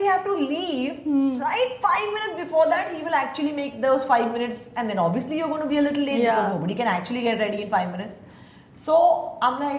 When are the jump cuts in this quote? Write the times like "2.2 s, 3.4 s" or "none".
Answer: none